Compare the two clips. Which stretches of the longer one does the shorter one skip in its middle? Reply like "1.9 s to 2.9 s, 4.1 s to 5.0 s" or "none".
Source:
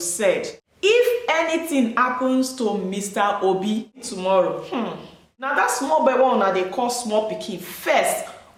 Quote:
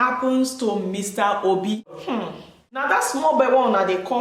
4.2 s to 4.9 s